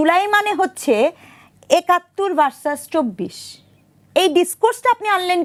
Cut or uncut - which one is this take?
uncut